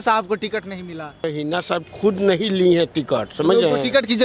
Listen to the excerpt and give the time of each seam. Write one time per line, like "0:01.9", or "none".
0:01.3